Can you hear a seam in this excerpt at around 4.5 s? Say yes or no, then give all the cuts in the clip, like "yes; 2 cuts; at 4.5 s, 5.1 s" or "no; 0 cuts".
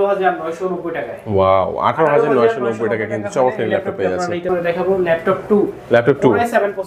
yes; 1 cut; at 4.5 s